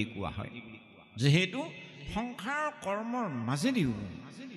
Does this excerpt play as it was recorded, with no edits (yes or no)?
yes